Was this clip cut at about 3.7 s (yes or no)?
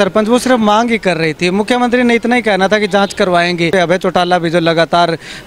yes